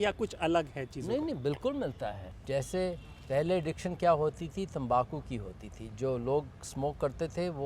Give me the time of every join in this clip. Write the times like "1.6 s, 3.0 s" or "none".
2.3 s

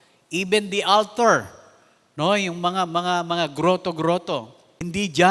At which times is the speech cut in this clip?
4.3 s

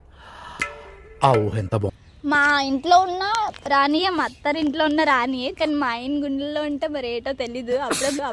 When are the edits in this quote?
2.0 s

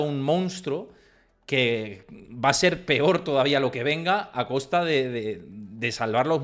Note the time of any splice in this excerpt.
none

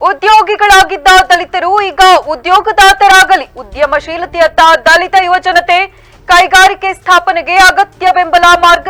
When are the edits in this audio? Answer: none

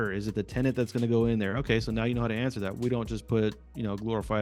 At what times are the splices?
none

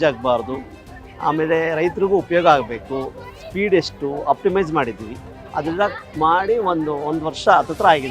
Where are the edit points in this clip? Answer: none

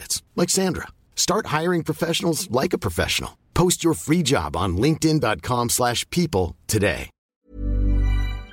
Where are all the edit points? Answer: 7.2 s

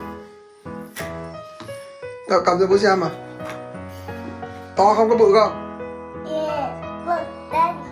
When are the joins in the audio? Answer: 2.3 s

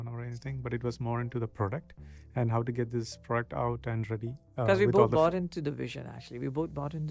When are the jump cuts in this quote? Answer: none

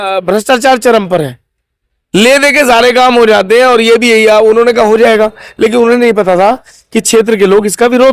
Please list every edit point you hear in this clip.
none

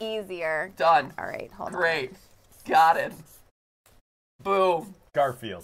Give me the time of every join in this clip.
none

